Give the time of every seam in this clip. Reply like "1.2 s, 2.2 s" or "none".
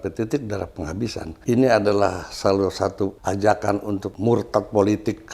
1.3 s, 3.2 s, 4.1 s